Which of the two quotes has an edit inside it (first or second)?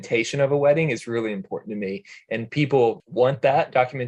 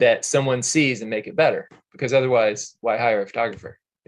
first